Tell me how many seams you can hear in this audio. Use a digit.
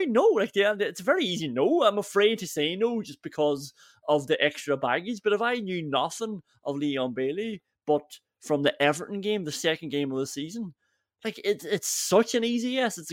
0